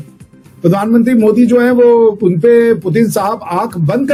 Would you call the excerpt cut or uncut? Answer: uncut